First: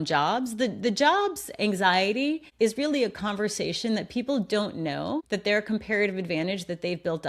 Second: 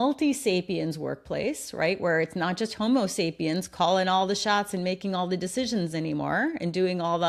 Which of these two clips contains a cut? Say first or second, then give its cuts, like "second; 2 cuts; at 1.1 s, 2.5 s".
first; 2 cuts; at 2.5 s, 5.2 s